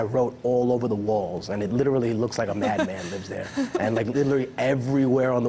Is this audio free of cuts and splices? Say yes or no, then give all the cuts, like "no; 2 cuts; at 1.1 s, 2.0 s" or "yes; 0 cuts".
no; 1 cut; at 3.4 s